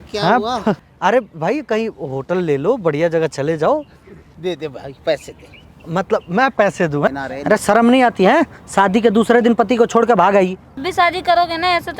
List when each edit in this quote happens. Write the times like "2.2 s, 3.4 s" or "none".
0.9 s, 7.1 s, 10.8 s